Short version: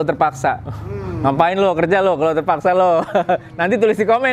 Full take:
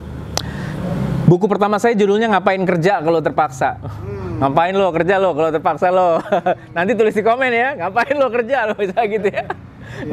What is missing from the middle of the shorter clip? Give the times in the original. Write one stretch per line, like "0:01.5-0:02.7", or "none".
none